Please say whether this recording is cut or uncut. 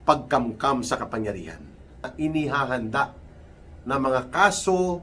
cut